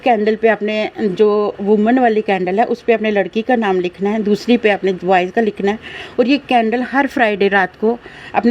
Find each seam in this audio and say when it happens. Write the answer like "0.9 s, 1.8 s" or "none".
none